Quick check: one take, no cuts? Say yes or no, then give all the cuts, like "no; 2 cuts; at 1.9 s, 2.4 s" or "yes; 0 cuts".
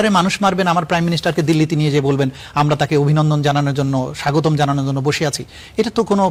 yes; 0 cuts